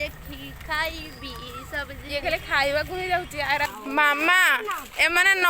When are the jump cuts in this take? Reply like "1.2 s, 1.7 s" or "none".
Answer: 3.7 s